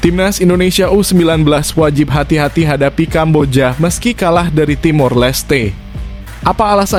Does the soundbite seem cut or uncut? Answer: uncut